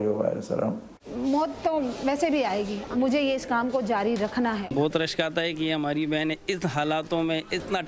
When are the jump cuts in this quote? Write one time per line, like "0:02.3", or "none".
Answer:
0:00.9
0:04.7